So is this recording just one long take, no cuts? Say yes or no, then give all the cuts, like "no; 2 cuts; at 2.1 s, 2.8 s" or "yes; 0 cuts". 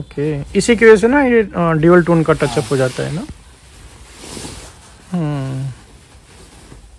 yes; 0 cuts